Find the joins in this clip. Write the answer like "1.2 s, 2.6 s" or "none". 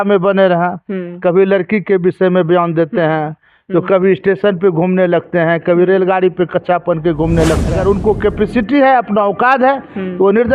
7.7 s